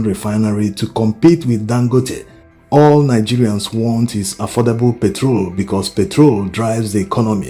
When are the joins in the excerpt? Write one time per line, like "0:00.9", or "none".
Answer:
0:06.2